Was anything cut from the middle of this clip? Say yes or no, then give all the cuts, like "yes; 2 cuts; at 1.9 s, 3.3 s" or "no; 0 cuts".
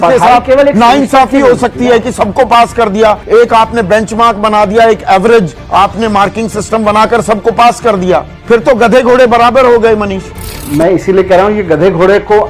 no; 0 cuts